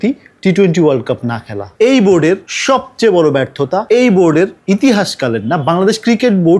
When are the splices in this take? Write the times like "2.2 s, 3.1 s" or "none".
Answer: none